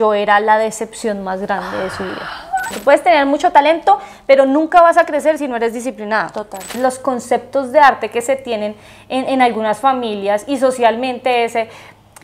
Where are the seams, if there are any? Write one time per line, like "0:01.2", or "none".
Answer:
0:02.7
0:06.8